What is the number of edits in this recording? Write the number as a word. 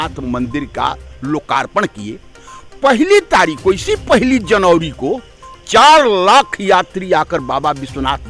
zero